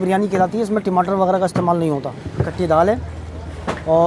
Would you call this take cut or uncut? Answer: cut